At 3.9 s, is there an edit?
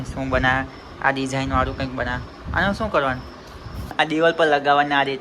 yes; 1 cut; at 3.9 s

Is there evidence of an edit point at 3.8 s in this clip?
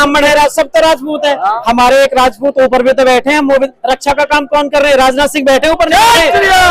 no; 1 cut; at 1.6 s

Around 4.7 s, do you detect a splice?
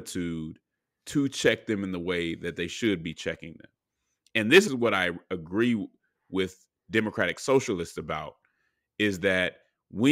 yes; 1 cut; at 4.7 s

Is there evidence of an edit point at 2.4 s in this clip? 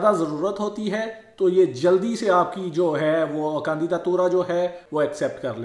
no; 0 cuts

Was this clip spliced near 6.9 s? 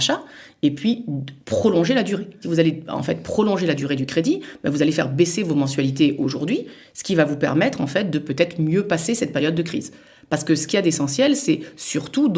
no; 1 cut; at 2.4 s

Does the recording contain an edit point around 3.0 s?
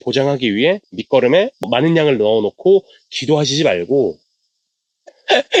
no; 0 cuts

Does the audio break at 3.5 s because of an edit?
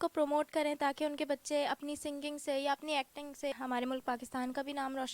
yes; 1 cut; at 3.5 s

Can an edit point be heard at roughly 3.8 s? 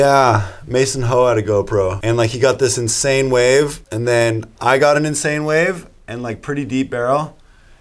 yes; 2 cuts; at 2.0 s, 3.8 s

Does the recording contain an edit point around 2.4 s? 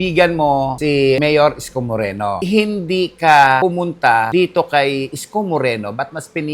yes; 1 cut; at 2.4 s

